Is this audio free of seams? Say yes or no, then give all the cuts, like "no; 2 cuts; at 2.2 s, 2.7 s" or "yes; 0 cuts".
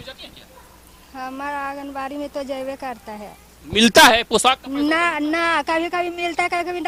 yes; 0 cuts